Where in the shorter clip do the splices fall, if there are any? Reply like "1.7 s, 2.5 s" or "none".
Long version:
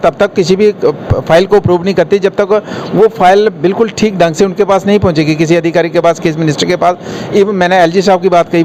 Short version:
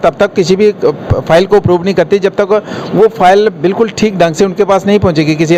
none